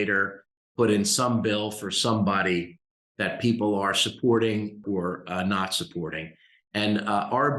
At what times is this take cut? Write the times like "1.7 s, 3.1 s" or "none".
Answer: 4.8 s